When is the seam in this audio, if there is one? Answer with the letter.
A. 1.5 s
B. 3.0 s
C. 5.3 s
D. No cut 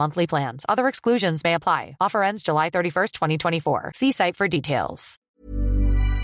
C